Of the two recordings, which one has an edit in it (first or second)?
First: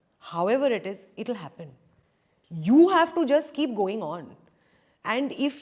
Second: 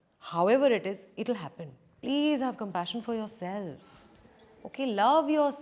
second